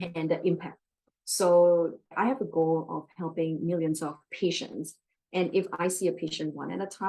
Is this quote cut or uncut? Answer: cut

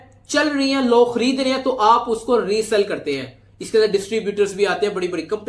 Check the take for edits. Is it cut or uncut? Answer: uncut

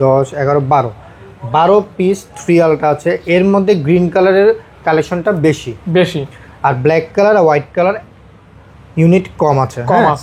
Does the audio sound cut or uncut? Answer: uncut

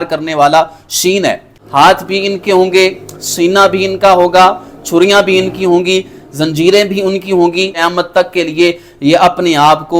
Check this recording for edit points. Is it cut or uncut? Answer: cut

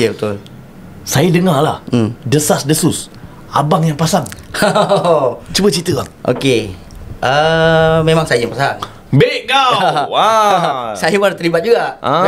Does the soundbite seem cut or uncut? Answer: uncut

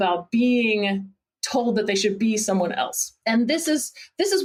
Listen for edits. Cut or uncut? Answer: uncut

